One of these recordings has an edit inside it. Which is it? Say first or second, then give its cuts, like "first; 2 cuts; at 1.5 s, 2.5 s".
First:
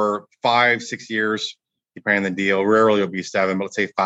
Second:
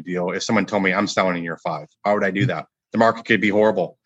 second; 2 cuts; at 1.9 s, 2.7 s